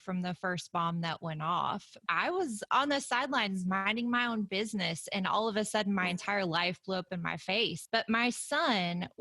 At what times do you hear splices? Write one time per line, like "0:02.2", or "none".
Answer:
0:02.0
0:07.8